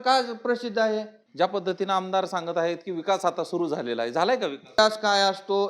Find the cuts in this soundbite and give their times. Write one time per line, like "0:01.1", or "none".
0:01.2
0:04.7